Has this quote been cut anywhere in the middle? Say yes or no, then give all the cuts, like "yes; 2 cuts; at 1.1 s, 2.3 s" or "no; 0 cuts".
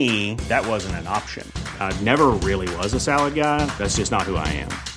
no; 0 cuts